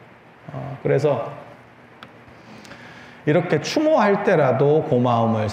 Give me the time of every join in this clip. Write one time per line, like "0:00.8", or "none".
none